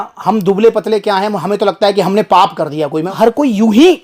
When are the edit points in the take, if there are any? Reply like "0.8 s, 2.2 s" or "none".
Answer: 3.1 s